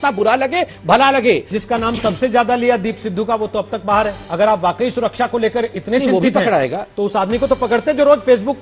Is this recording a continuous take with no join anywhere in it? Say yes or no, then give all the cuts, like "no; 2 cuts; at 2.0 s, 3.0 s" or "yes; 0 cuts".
no; 2 cuts; at 1.6 s, 4.2 s